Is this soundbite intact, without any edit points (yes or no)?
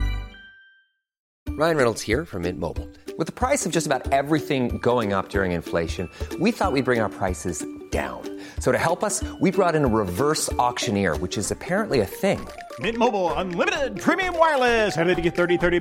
no